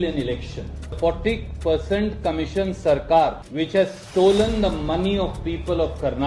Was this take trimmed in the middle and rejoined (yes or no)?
yes